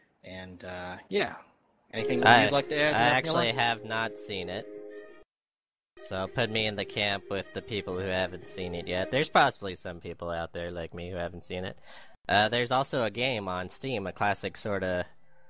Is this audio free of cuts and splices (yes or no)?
yes